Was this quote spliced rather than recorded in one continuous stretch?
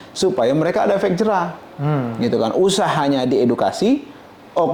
no; 0 cuts

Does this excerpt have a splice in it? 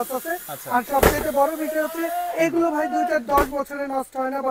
no; 0 cuts

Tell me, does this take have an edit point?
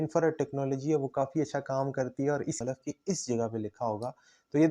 yes; 1 cut; at 2.6 s

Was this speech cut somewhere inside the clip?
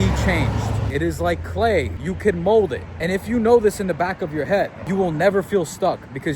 yes; 4 cuts; at 0.8 s, 2.0 s, 2.9 s, 4.8 s

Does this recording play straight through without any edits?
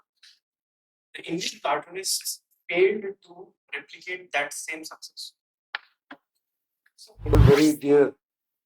no; 1 cut; at 7.4 s

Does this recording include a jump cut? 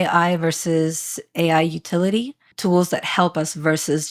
no; 0 cuts

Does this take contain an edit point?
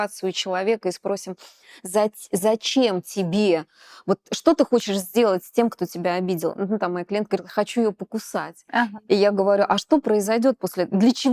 no; 0 cuts

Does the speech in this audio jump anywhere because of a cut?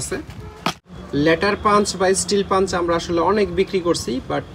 yes; 1 cut; at 0.9 s

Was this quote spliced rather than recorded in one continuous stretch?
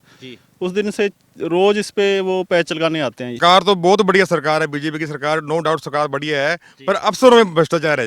yes; 1 cut; at 3.4 s

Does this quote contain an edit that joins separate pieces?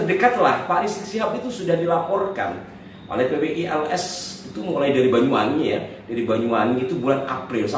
no; 0 cuts

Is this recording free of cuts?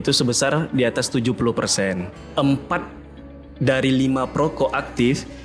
no; 1 cut; at 2.2 s

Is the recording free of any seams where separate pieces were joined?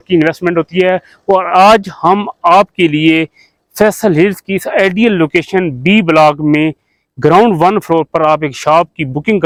yes; 0 cuts

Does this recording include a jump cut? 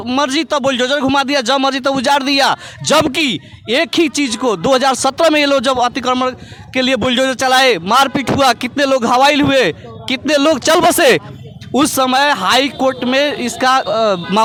no; 0 cuts

